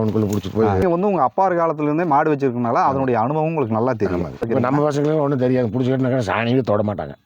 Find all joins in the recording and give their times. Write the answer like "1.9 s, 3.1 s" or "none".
0.8 s, 4.5 s